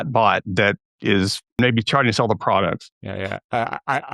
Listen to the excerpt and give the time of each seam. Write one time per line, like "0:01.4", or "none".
0:01.6
0:02.9